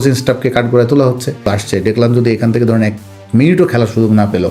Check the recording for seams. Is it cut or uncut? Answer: cut